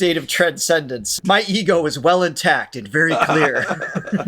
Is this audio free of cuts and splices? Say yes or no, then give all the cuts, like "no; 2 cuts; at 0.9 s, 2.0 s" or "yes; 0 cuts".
no; 1 cut; at 1.2 s